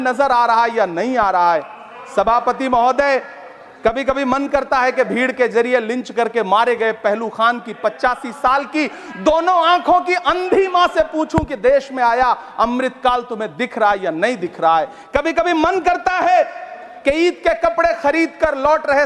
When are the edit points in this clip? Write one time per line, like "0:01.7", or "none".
none